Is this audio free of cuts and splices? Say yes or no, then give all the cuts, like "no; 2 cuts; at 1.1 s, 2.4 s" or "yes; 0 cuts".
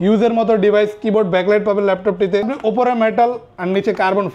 no; 1 cut; at 2.5 s